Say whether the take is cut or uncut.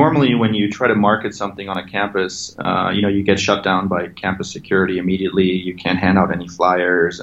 uncut